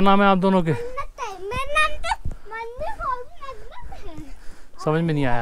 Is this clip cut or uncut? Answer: uncut